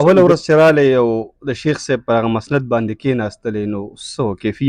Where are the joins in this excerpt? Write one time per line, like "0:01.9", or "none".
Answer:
none